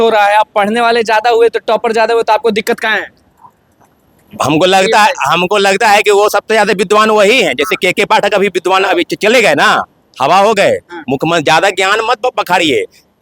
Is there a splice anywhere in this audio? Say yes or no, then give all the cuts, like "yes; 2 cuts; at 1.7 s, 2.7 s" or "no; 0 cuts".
no; 0 cuts